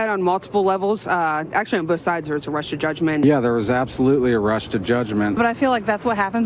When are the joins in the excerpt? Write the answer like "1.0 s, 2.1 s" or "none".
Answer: 3.2 s, 5.3 s

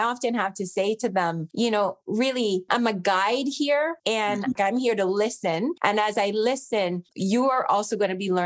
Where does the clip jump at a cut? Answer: 7.1 s

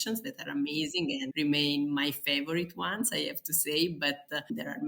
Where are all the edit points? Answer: 1.3 s

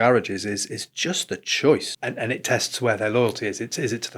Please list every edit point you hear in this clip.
1.9 s

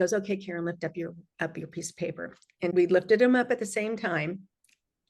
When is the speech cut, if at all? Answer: 2.7 s

